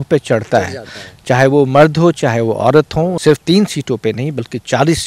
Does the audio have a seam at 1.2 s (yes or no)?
no